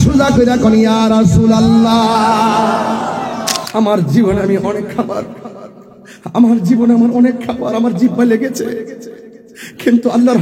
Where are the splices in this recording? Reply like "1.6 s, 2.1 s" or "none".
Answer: 3.6 s